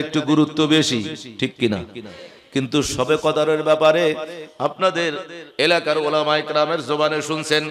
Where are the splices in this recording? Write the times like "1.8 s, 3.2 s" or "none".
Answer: none